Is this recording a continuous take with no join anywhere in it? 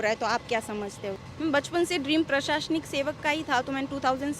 no; 1 cut; at 1.2 s

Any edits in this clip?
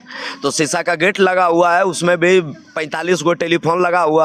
no; 0 cuts

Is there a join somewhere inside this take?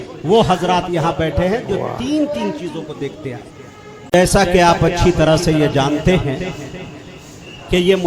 yes; 1 cut; at 4.1 s

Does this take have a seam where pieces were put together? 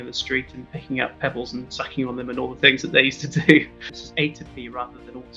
yes; 1 cut; at 4.0 s

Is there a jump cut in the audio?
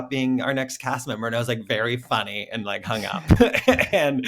no; 0 cuts

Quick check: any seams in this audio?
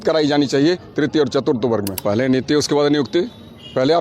yes; 1 cut; at 1.9 s

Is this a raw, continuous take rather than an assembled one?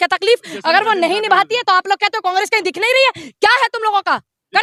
yes; 0 cuts

